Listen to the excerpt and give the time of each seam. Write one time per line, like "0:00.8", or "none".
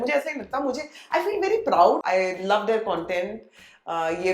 0:02.0